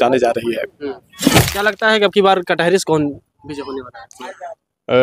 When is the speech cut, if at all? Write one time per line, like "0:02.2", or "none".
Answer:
0:01.4